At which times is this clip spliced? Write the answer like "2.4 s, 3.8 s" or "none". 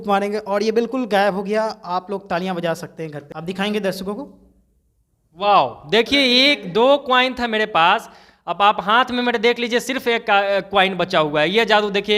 3.3 s